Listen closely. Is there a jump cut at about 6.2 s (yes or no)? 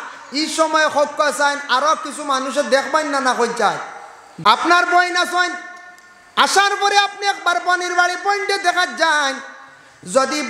no